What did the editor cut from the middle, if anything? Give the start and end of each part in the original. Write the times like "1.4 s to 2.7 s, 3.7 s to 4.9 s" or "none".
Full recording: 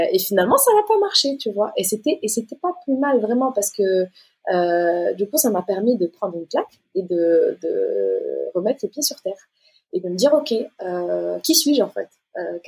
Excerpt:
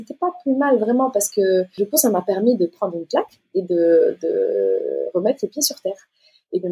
4.2 s to 5.2 s